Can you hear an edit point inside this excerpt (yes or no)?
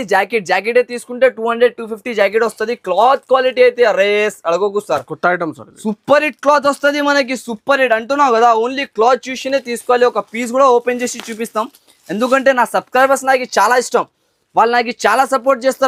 no